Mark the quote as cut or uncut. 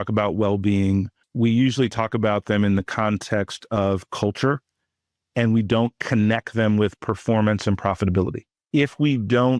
cut